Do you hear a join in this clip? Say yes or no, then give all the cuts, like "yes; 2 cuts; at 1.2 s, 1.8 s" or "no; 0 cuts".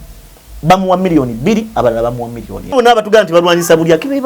yes; 1 cut; at 2.7 s